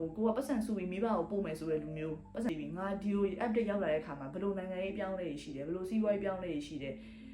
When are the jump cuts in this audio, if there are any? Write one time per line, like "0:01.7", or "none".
0:02.5